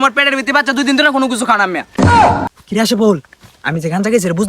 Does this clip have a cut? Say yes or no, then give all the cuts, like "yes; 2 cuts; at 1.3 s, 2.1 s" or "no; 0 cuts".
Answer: yes; 1 cut; at 2.5 s